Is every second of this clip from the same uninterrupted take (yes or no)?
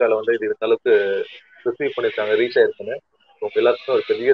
yes